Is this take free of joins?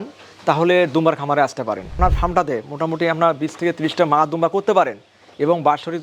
no; 1 cut; at 1.9 s

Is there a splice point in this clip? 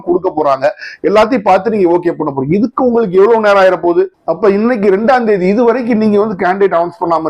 no; 0 cuts

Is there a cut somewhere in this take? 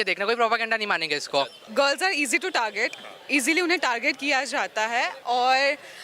yes; 1 cut; at 1.6 s

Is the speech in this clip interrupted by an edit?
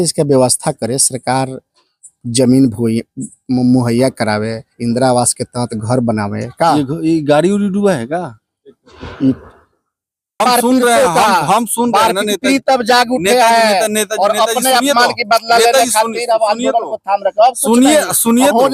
yes; 1 cut; at 10.4 s

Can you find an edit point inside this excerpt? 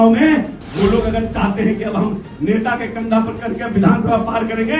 no; 0 cuts

